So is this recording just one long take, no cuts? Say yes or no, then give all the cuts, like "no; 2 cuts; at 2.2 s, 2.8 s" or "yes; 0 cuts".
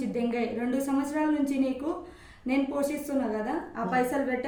yes; 0 cuts